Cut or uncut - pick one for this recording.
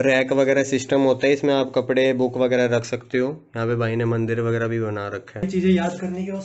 cut